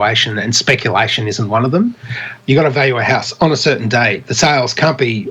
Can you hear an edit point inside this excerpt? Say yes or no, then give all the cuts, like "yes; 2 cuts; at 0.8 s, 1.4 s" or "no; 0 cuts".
yes; 1 cut; at 2.3 s